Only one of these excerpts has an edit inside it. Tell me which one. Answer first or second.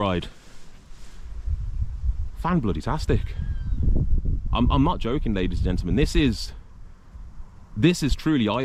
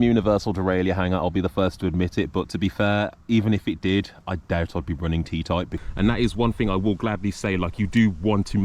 second